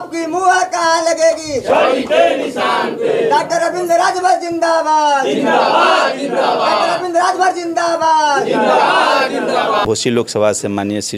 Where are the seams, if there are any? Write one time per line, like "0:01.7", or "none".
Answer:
0:09.8